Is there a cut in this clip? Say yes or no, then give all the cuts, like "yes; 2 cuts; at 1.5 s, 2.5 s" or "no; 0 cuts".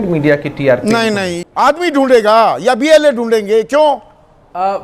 yes; 1 cut; at 1.3 s